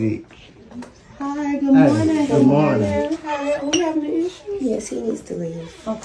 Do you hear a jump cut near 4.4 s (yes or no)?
no